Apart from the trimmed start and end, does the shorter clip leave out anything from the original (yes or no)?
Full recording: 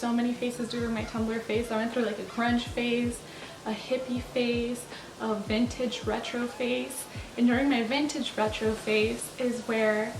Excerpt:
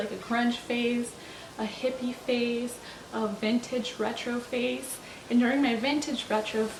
no